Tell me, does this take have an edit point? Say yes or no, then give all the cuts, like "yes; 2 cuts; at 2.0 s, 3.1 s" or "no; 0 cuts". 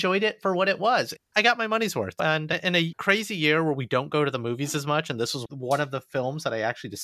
yes; 2 cuts; at 1.4 s, 2.9 s